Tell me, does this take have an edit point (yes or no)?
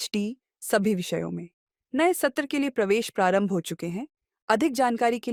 no